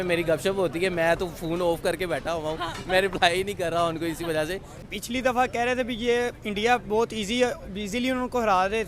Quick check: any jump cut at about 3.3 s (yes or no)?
no